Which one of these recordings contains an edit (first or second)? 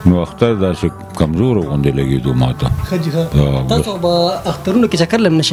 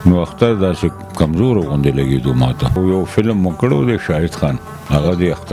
second